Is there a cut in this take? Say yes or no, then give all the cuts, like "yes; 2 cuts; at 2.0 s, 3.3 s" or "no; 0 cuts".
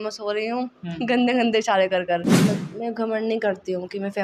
yes; 1 cut; at 2.3 s